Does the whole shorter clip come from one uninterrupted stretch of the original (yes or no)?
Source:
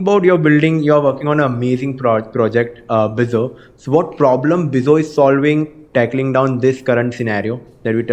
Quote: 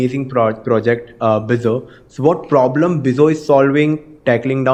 yes